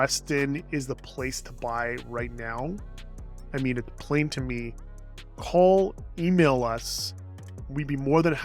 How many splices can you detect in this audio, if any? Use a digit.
0